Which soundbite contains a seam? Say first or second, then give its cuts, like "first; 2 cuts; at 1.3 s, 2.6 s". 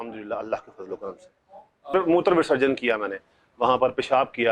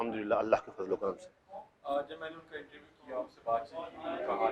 first; 1 cut; at 1.9 s